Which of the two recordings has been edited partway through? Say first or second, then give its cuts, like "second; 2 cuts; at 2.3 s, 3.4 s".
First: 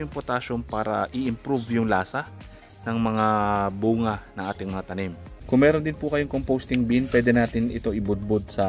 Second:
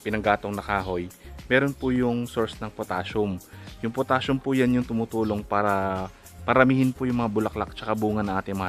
first; 1 cut; at 5.3 s